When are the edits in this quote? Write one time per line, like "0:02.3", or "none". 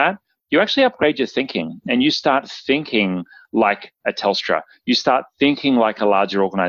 none